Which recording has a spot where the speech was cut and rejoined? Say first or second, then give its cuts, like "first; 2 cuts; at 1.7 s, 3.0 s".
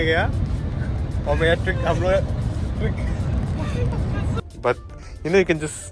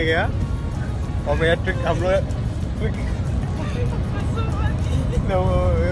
first; 1 cut; at 4.4 s